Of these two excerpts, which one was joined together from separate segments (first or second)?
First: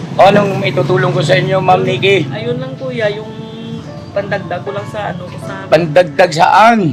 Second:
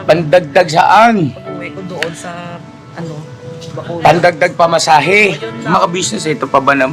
second